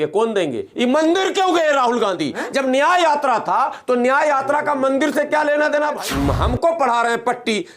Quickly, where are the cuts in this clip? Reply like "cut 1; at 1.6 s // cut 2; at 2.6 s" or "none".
cut 1; at 6.0 s